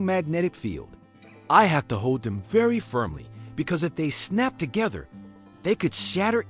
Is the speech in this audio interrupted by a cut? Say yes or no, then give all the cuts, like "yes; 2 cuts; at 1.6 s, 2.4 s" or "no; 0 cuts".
no; 0 cuts